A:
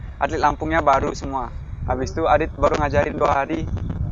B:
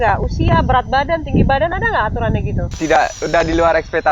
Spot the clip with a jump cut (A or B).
B